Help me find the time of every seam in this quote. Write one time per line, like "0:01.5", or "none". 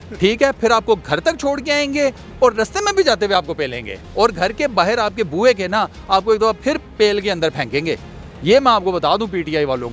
none